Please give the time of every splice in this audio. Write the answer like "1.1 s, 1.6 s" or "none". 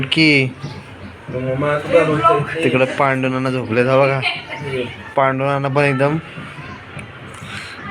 none